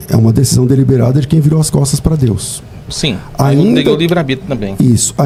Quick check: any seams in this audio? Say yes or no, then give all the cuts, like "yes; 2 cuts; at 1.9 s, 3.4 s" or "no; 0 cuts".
no; 0 cuts